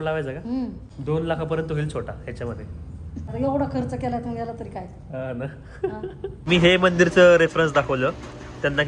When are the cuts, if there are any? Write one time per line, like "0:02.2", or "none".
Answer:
0:03.3
0:06.4